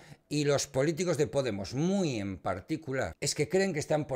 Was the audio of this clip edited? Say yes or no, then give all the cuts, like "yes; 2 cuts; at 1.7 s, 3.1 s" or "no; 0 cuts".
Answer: yes; 1 cut; at 3.2 s